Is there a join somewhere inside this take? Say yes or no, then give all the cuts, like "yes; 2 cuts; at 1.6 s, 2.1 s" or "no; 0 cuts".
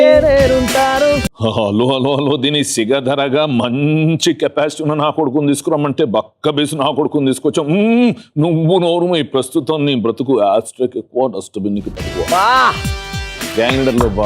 yes; 1 cut; at 1.3 s